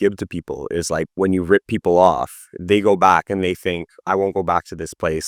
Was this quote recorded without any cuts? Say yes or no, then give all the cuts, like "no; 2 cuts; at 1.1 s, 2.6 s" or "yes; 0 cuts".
yes; 0 cuts